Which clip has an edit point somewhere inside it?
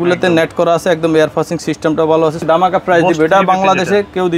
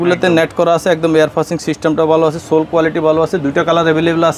first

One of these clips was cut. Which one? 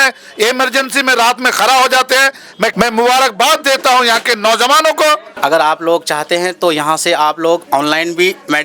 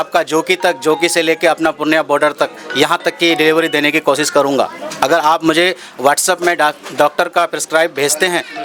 first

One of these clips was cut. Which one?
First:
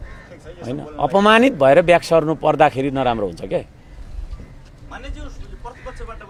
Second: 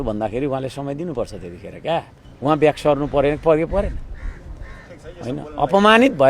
second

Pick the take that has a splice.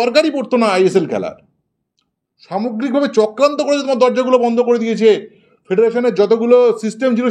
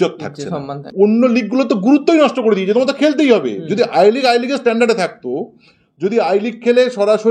second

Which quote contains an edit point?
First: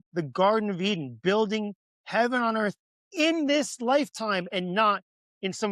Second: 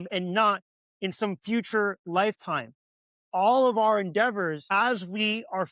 second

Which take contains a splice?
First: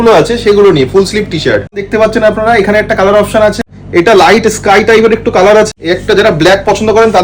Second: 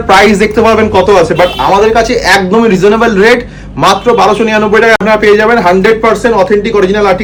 first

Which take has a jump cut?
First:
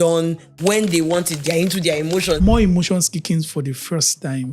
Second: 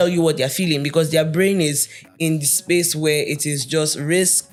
first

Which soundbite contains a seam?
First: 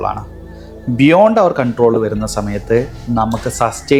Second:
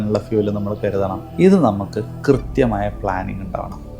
second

